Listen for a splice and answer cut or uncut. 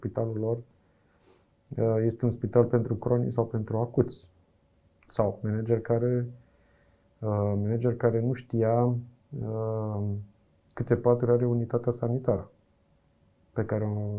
uncut